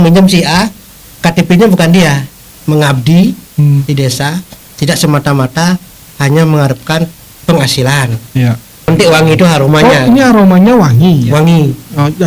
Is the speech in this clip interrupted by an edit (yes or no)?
yes